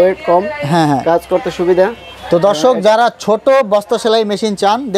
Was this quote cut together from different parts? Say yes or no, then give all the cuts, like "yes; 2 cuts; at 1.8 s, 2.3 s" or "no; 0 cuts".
no; 0 cuts